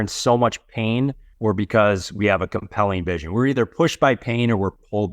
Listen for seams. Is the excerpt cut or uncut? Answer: cut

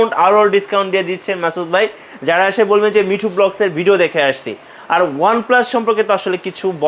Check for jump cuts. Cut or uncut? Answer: uncut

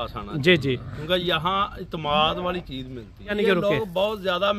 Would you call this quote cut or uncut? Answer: cut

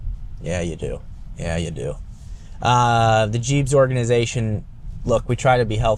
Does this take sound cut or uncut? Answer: uncut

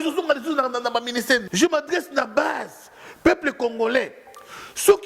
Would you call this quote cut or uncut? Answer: cut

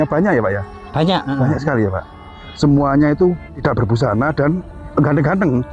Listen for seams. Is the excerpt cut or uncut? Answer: cut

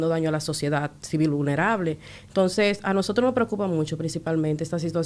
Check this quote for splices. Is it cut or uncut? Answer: uncut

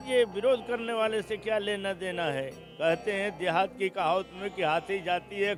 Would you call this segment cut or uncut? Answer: uncut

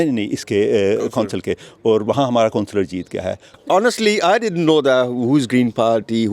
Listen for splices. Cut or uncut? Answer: cut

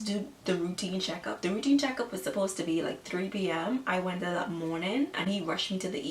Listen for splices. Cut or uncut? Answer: uncut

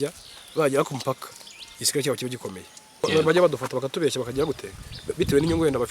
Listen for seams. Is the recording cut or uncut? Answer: cut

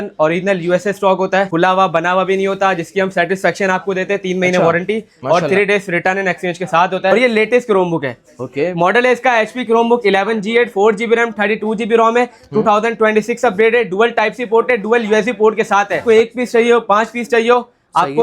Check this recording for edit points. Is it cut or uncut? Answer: cut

